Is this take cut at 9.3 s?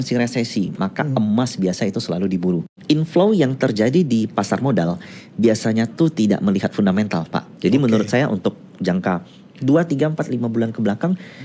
no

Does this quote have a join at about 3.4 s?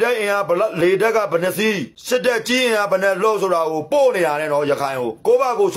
no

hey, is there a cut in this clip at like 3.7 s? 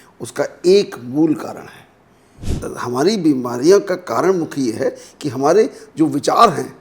no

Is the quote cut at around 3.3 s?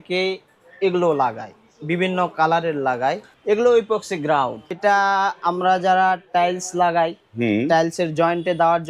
yes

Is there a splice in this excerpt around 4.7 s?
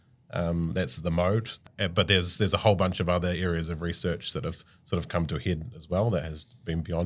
no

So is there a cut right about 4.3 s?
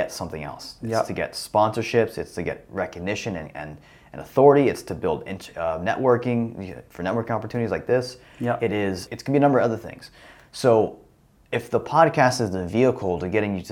no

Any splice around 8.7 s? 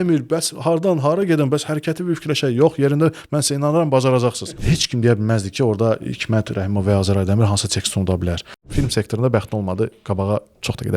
yes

